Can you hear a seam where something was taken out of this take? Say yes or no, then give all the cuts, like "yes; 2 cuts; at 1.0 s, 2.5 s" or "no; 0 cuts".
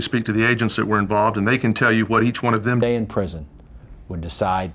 yes; 1 cut; at 2.5 s